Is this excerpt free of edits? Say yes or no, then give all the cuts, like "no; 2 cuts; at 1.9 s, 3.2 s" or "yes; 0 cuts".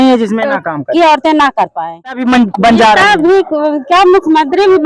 no; 1 cut; at 2.2 s